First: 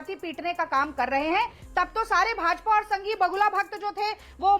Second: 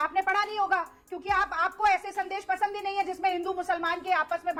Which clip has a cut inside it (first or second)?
first